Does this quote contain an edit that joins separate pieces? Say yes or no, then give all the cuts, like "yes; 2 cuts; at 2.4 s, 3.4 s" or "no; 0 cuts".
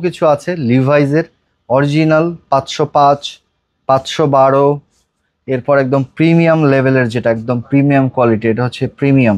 no; 0 cuts